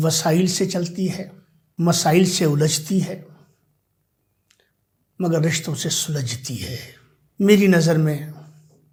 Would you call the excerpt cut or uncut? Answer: uncut